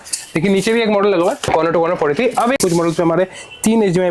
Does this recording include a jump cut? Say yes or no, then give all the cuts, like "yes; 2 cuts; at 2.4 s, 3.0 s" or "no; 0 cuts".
yes; 1 cut; at 2.6 s